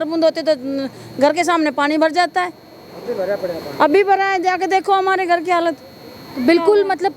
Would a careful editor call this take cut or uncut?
uncut